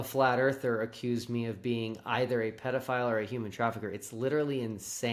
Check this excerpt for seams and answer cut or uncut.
uncut